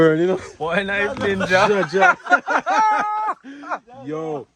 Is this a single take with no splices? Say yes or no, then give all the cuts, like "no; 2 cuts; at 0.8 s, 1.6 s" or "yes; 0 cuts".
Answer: yes; 0 cuts